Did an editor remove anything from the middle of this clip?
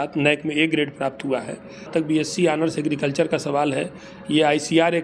yes; 1 cut; at 1.9 s

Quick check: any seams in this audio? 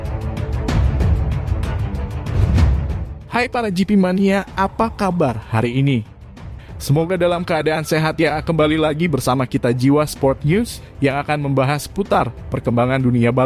no; 0 cuts

